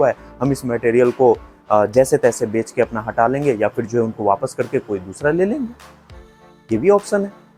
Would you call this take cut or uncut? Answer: uncut